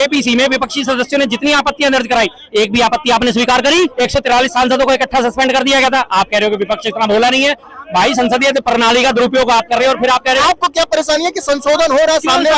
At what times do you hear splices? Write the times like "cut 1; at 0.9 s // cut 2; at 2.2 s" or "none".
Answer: cut 1; at 3.9 s // cut 2; at 10.4 s